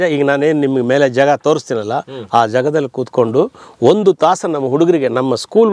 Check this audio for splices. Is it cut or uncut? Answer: uncut